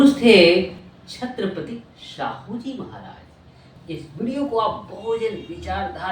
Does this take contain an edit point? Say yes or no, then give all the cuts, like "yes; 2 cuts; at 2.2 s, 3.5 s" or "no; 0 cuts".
yes; 1 cut; at 3.8 s